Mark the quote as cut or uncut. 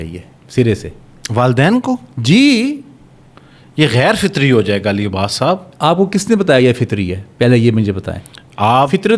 uncut